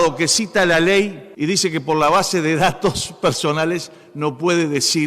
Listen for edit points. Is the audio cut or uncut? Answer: cut